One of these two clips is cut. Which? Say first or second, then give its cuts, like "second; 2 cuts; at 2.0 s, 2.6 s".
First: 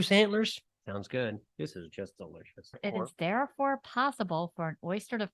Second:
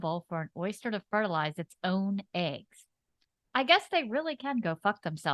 first; 1 cut; at 2.8 s